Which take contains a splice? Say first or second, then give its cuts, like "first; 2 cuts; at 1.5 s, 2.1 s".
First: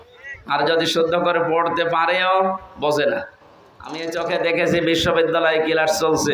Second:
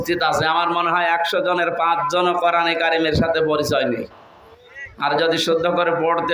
first; 1 cut; at 4.0 s